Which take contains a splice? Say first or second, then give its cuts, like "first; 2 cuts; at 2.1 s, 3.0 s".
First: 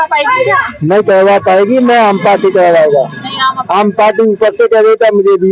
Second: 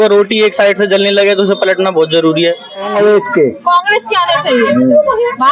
second; 1 cut; at 2.9 s